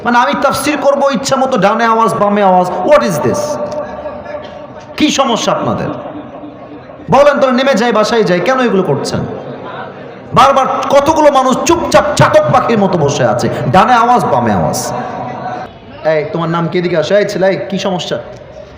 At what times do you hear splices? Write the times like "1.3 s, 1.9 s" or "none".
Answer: 15.6 s